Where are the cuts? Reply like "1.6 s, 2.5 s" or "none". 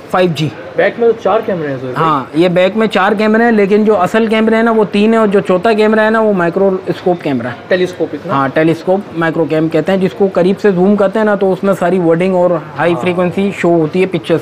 none